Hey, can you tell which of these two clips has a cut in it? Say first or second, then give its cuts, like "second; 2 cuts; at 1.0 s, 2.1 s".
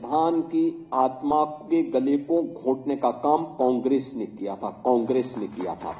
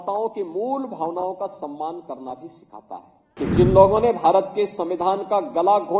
second; 1 cut; at 3.2 s